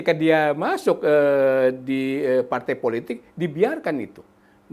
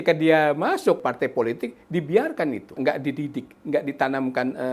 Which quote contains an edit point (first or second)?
second